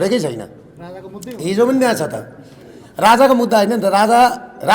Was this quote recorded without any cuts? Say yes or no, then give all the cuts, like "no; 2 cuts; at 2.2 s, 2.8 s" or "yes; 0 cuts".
yes; 0 cuts